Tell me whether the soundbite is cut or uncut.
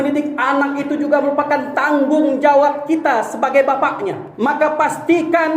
cut